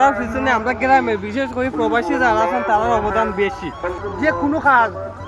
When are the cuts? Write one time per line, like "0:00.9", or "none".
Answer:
0:04.0